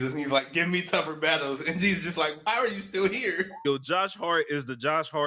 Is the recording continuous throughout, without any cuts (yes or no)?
no